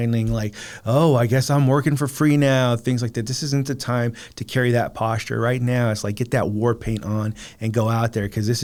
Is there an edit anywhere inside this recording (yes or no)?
no